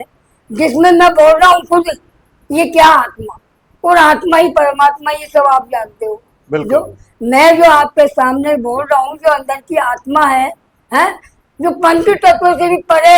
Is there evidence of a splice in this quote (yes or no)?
no